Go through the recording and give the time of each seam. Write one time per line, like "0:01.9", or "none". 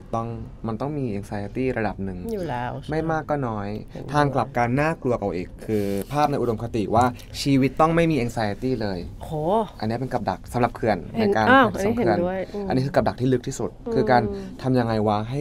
none